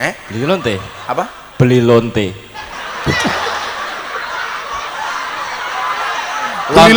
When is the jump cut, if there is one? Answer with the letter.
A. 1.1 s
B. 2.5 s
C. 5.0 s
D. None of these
D